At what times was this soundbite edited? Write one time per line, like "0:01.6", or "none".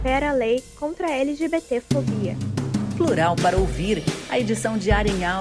0:02.5